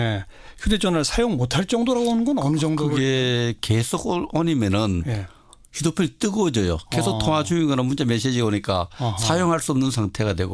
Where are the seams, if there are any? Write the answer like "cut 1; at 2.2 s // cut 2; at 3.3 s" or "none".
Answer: cut 1; at 6.9 s